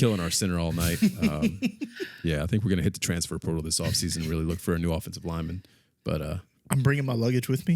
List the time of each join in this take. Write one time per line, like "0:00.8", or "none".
0:06.5